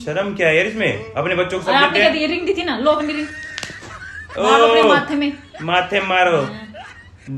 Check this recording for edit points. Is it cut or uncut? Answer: uncut